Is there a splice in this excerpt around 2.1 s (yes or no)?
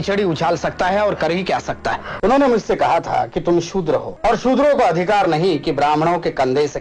yes